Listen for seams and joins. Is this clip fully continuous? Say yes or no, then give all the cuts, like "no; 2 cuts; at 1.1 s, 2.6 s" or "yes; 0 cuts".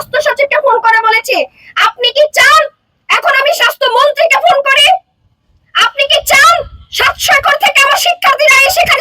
yes; 0 cuts